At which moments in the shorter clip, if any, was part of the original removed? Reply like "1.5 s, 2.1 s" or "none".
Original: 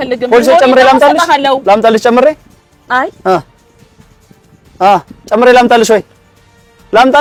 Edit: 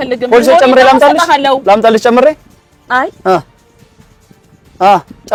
none